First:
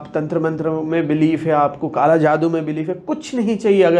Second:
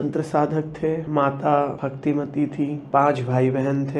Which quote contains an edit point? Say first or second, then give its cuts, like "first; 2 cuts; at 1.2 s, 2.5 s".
second; 3 cuts; at 1.0 s, 1.8 s, 2.8 s